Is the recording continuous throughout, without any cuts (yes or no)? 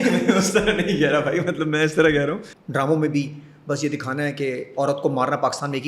no